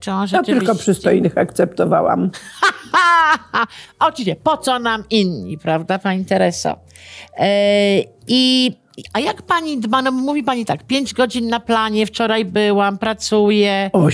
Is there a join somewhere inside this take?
no; 0 cuts

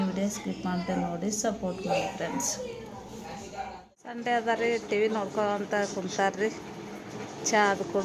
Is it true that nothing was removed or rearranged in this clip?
no; 1 cut; at 4.2 s

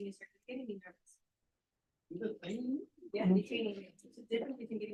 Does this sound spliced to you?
no; 0 cuts

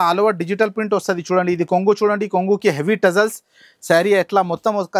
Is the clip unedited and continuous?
yes; 0 cuts

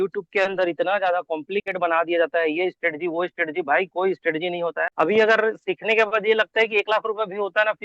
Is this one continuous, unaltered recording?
no; 1 cut; at 4.9 s

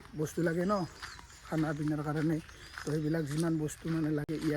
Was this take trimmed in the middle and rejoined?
no; 0 cuts

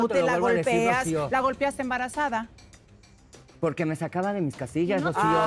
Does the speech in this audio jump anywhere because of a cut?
no; 0 cuts

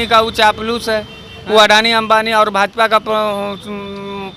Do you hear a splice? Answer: no; 0 cuts

